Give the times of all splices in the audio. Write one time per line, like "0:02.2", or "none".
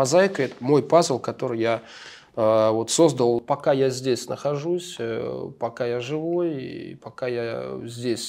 0:03.5